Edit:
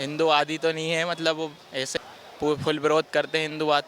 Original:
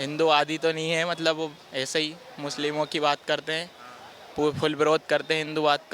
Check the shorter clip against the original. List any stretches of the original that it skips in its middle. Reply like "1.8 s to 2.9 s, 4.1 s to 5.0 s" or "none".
1.9 s to 3.9 s